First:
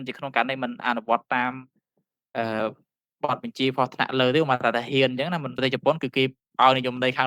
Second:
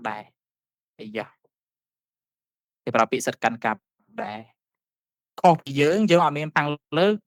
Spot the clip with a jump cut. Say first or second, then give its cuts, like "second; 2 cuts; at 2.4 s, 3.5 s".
first; 1 cut; at 5.6 s